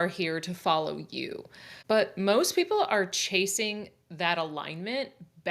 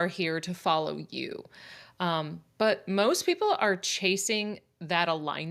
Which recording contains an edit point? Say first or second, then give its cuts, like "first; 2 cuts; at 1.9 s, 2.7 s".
first; 1 cut; at 1.7 s